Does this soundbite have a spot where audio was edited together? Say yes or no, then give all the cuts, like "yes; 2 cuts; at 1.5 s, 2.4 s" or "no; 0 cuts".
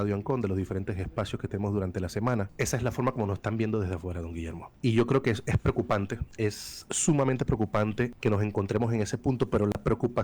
yes; 4 cuts; at 2.5 s, 4.6 s, 6.2 s, 8.1 s